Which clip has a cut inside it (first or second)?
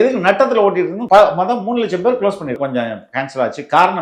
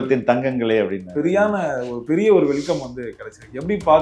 first